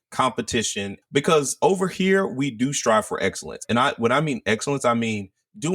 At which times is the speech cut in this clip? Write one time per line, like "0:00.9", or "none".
0:01.0
0:03.6

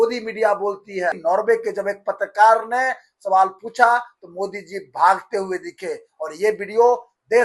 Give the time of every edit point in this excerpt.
0:01.2

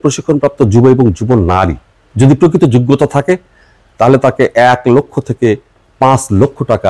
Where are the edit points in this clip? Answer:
none

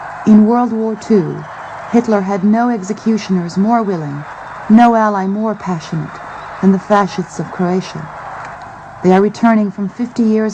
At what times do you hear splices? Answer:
none

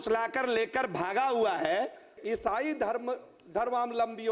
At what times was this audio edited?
0:02.2

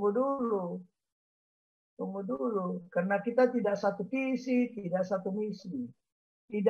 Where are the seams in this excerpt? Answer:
none

